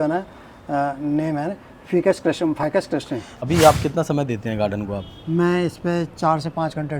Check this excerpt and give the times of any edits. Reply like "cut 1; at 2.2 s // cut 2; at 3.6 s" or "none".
cut 1; at 3.4 s